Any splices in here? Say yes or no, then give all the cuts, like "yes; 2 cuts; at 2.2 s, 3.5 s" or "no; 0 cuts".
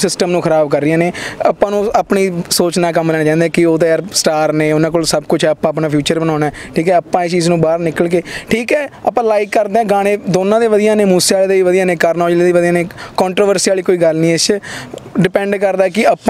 no; 0 cuts